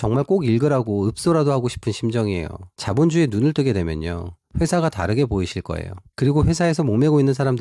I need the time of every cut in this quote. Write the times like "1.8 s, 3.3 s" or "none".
none